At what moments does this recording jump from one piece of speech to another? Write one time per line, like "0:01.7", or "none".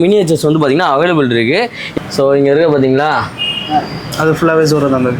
0:01.8